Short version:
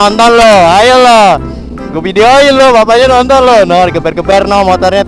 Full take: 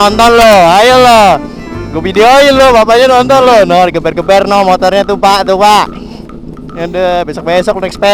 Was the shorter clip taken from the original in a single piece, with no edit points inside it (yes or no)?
yes